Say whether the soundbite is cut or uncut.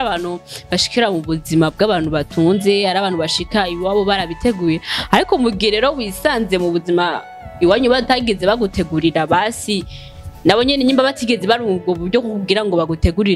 uncut